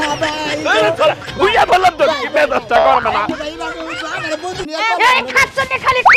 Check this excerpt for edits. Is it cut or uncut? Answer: cut